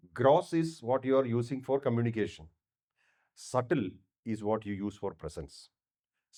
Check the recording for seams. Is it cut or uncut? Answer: uncut